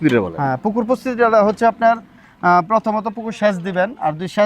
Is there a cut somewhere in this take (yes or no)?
no